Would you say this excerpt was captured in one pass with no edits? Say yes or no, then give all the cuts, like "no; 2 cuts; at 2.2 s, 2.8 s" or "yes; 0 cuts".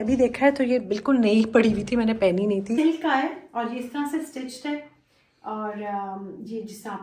no; 1 cut; at 2.8 s